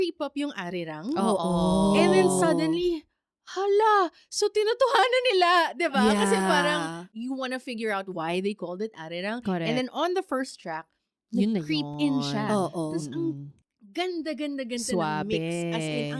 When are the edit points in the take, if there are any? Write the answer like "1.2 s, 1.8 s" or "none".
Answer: 7.1 s